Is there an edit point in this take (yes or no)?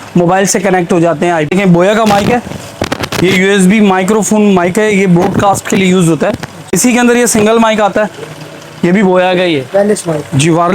yes